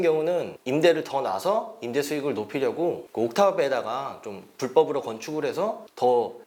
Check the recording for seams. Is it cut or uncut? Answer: uncut